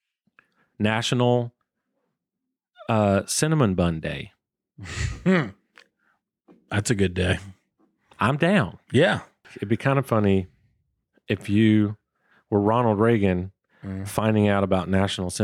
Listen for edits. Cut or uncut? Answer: cut